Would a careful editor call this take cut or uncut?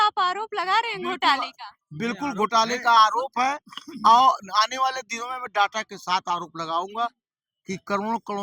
uncut